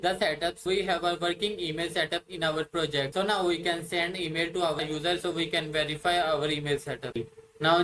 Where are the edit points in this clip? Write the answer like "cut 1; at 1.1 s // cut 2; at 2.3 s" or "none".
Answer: cut 1; at 4.8 s // cut 2; at 7.1 s

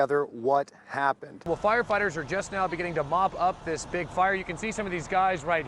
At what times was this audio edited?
cut 1; at 1.5 s

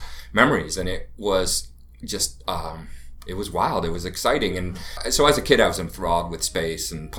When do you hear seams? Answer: cut 1; at 5.0 s

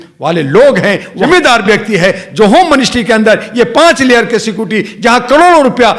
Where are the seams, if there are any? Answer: cut 1; at 1.1 s

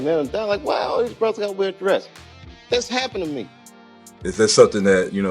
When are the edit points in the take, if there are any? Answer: cut 1; at 4.2 s

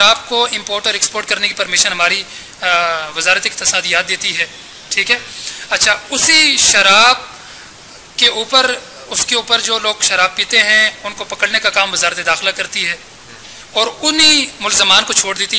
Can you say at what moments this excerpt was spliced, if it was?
none

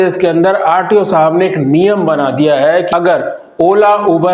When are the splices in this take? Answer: cut 1; at 2.9 s

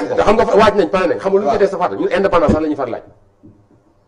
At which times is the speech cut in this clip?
none

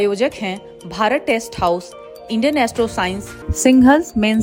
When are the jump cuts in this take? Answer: none

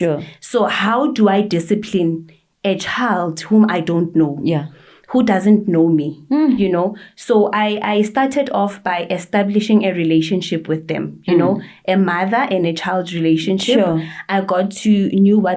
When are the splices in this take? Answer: none

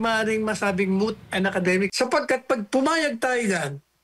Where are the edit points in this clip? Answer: cut 1; at 1.9 s

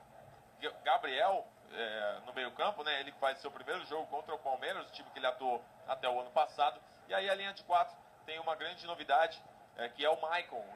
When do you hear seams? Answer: none

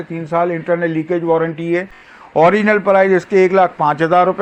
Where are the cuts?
none

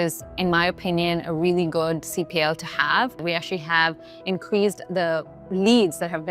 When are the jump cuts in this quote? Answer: cut 1; at 3.2 s

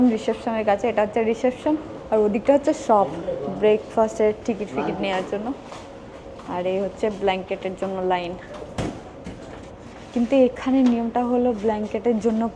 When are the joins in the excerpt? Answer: none

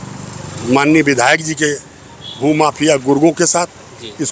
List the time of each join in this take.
none

